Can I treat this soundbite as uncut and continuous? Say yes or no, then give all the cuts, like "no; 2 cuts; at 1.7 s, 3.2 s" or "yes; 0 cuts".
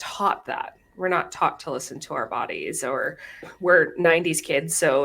no; 1 cut; at 3.5 s